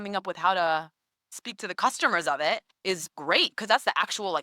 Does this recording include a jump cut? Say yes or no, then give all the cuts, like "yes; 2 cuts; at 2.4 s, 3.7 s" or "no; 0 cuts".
yes; 1 cut; at 1.4 s